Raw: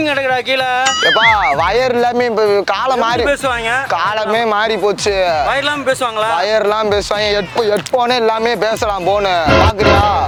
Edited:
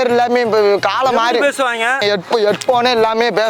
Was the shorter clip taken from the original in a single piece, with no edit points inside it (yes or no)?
no